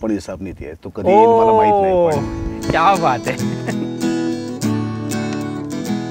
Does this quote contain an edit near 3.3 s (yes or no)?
yes